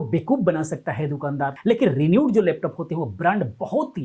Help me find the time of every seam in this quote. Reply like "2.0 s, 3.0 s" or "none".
1.6 s